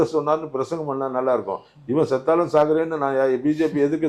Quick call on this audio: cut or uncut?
uncut